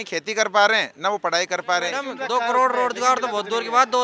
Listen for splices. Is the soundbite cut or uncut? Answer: cut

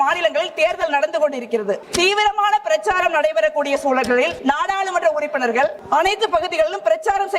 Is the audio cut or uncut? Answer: cut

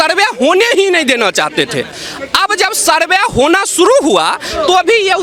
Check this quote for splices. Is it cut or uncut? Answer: uncut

